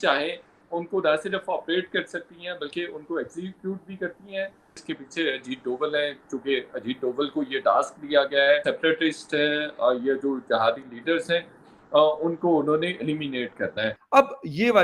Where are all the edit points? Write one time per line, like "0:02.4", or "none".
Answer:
0:04.8
0:08.6
0:14.0